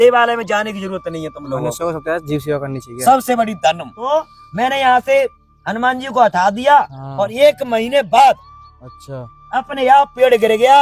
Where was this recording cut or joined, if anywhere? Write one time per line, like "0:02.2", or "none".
0:03.9

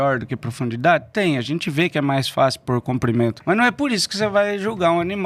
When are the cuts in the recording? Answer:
0:03.4

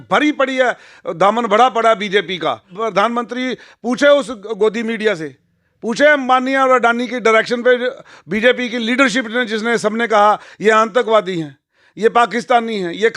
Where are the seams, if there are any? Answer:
0:02.7

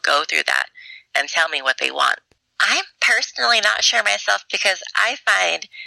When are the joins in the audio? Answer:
0:02.3

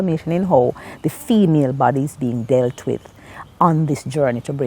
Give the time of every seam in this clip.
none

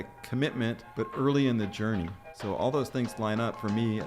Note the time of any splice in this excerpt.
0:00.8
0:02.3

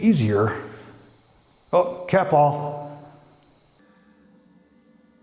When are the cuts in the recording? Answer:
0:03.8

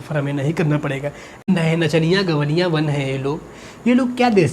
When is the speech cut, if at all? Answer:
0:01.4

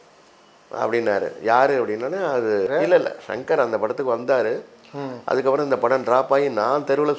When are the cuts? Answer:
0:02.7

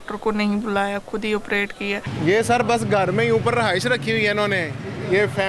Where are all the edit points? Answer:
0:02.0

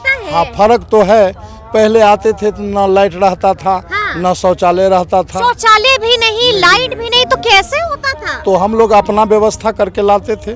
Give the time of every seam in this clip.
none

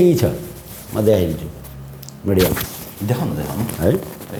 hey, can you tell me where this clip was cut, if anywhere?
none

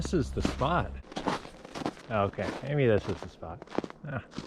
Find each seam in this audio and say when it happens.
0:01.0

